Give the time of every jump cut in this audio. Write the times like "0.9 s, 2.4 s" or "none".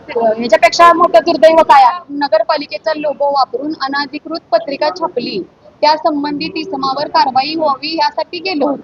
2.1 s

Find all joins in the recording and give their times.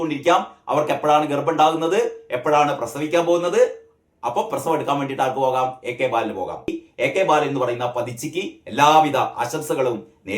6.7 s

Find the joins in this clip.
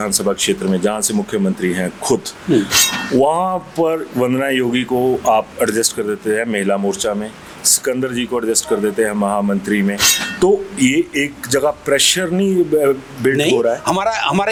none

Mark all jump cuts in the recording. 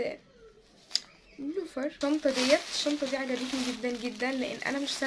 2.0 s

